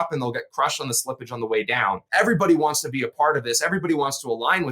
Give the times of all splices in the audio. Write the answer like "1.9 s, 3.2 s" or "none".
2.0 s

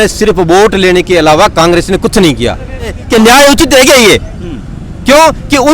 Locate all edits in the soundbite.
3.0 s

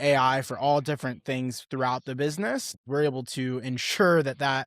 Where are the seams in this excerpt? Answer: 2.8 s

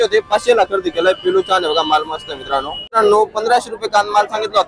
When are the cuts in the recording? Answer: 3.0 s

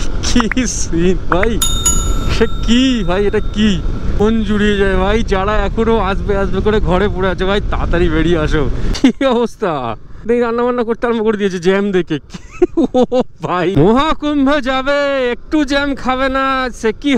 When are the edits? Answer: 4.2 s, 8.8 s, 10.3 s, 13.7 s

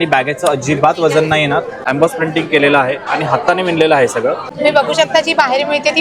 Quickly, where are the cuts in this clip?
1.8 s, 4.5 s

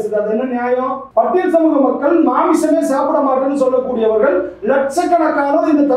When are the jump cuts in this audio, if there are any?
1.0 s

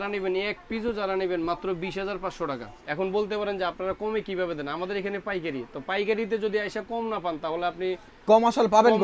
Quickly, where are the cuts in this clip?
2.7 s

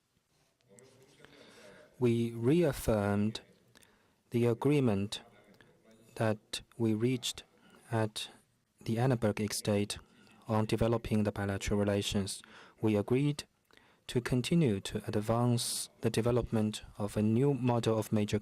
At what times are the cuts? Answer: 5.4 s

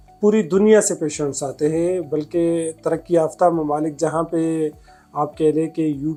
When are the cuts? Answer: none

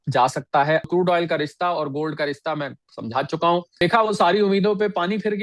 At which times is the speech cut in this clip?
0.9 s, 3.8 s

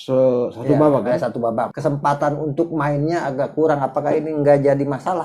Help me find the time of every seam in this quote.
1.7 s

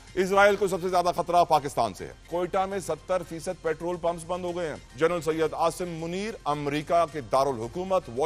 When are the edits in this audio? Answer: 2.2 s, 4.8 s

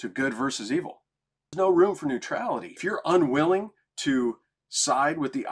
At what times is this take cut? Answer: 1.5 s, 2.8 s

